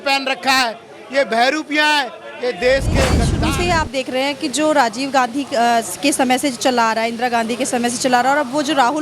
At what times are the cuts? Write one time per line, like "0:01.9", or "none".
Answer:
0:03.3